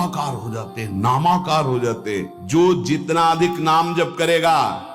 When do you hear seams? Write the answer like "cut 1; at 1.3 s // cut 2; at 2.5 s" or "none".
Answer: cut 1; at 2.3 s